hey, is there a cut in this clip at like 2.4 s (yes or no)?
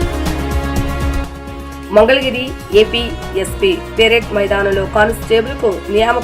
no